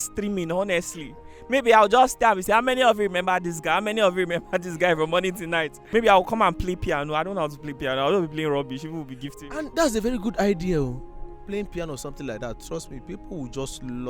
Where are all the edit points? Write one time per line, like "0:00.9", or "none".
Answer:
0:05.8